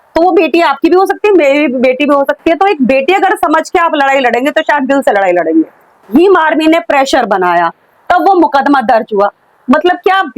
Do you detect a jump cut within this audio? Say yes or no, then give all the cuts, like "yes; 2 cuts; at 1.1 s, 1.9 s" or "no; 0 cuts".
yes; 1 cut; at 6.0 s